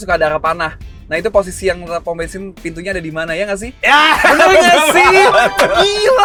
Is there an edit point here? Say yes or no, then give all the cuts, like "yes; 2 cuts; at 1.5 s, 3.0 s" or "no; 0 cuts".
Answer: no; 0 cuts